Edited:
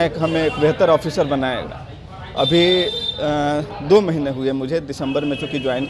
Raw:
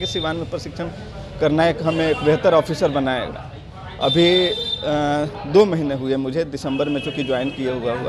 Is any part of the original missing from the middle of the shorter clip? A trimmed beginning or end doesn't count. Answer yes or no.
no